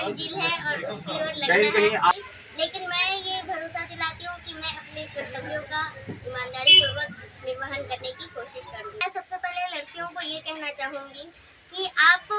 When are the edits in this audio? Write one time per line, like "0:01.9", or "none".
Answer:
0:02.1
0:09.0